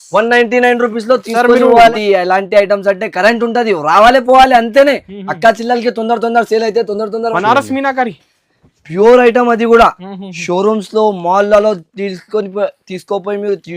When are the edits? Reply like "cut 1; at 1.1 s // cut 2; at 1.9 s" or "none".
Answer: cut 1; at 1.9 s // cut 2; at 7.3 s